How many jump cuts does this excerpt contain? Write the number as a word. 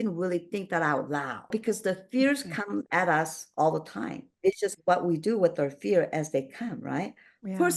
two